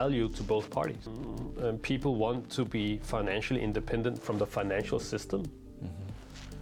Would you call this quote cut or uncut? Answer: cut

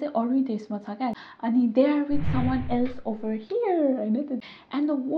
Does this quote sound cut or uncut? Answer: cut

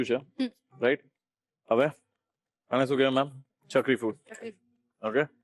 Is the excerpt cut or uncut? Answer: uncut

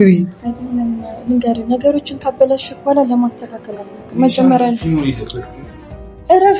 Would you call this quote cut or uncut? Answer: uncut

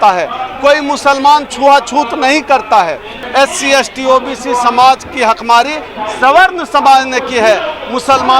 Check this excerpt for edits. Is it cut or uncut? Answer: cut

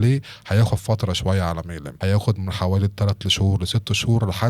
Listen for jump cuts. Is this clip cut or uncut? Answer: cut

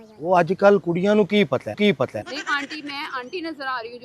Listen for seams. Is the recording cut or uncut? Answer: cut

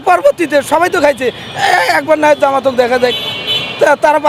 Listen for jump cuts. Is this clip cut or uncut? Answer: uncut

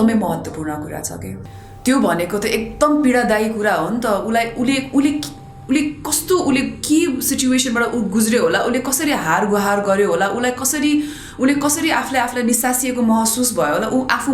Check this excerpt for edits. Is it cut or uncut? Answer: cut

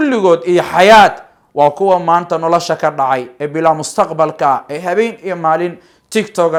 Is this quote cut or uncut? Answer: uncut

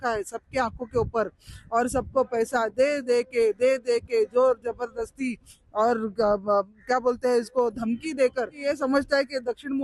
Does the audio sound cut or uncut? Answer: cut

